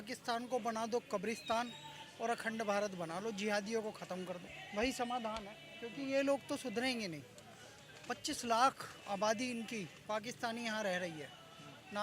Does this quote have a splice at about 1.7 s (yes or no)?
no